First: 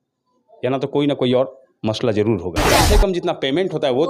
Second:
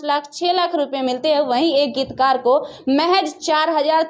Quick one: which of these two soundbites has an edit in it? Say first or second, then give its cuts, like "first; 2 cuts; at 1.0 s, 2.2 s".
first; 1 cut; at 2.8 s